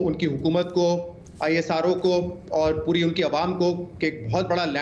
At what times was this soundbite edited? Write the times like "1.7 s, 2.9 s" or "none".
none